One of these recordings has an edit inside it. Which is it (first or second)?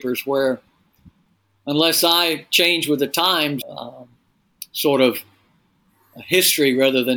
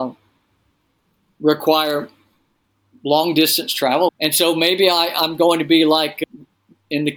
second